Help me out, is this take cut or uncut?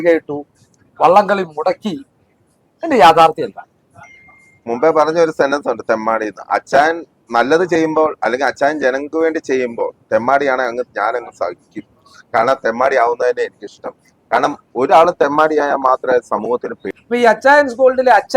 cut